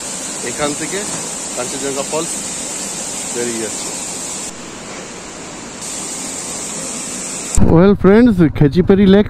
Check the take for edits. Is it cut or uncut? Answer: cut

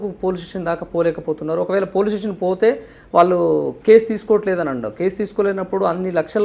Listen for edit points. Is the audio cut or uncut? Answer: uncut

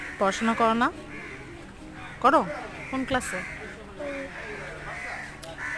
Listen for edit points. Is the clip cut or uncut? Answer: uncut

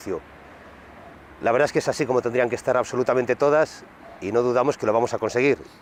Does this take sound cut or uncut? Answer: uncut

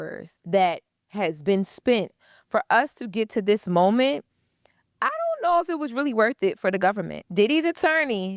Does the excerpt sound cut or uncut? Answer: cut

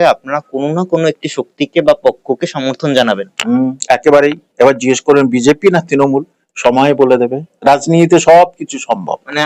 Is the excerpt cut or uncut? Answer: uncut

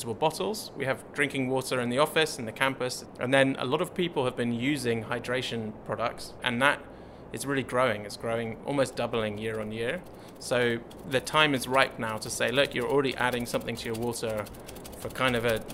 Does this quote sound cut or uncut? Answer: cut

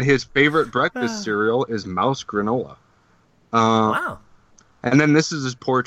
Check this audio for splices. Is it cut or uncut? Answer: uncut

